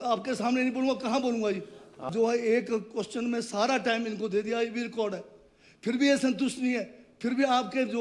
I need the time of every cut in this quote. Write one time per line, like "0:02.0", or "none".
0:02.1